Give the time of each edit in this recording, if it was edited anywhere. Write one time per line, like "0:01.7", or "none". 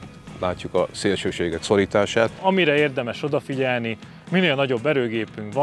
0:02.4